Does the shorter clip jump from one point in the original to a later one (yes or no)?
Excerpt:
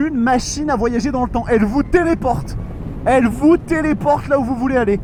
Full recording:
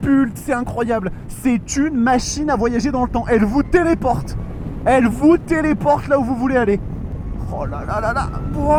no